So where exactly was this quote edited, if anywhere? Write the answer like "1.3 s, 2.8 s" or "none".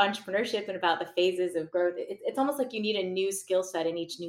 none